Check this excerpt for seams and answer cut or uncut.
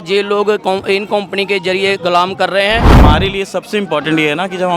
cut